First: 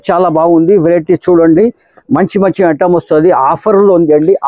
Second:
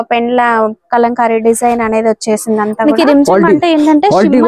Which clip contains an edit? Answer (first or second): second